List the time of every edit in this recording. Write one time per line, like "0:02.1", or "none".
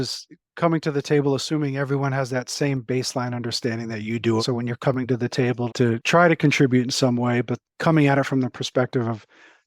0:04.4
0:05.8
0:07.6